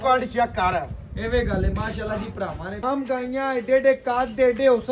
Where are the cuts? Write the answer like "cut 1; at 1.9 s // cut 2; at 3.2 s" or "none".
cut 1; at 2.8 s